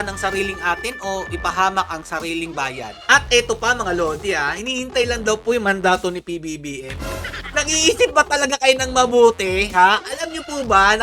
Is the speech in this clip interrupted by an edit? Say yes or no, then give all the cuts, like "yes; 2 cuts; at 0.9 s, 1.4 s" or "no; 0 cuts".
yes; 2 cuts; at 3.0 s, 7.4 s